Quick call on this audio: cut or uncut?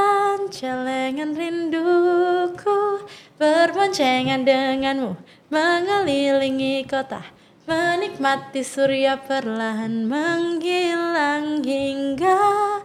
uncut